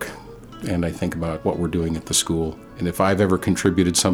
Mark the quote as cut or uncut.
cut